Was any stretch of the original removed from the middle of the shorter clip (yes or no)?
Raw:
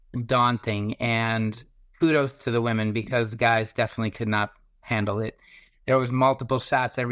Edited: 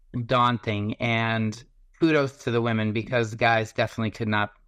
no